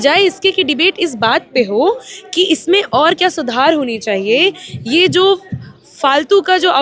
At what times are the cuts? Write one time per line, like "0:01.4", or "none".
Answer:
none